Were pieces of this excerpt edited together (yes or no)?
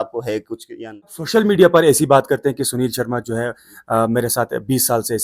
yes